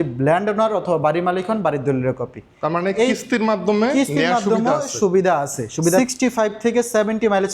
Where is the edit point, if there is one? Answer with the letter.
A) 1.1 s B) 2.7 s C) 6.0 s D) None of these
C